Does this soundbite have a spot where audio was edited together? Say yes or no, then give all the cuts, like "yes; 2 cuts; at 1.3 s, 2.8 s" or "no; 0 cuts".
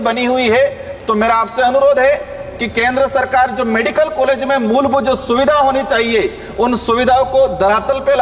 no; 0 cuts